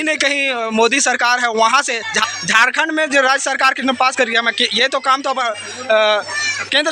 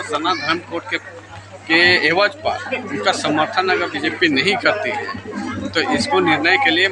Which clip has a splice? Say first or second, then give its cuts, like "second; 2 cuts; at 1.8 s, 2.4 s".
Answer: first; 1 cut; at 2.2 s